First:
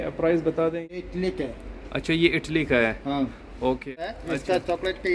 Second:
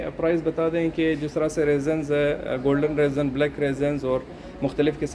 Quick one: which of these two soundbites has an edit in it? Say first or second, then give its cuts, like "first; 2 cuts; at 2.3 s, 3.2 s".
first; 2 cuts; at 0.9 s, 4.1 s